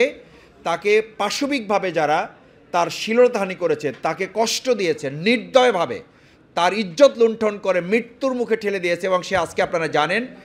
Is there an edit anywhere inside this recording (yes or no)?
no